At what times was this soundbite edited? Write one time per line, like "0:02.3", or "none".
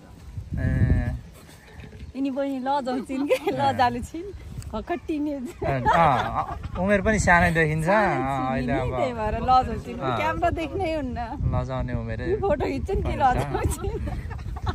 none